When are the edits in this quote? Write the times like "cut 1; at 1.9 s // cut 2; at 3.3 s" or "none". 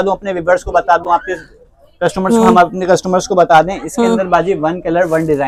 none